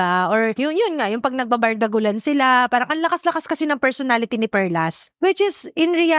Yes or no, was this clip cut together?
yes